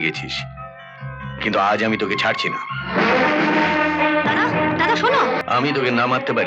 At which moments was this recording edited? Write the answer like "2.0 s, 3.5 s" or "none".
5.4 s